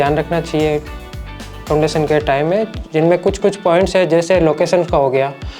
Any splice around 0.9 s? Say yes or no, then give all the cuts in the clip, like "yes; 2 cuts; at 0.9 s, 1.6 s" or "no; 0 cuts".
no; 0 cuts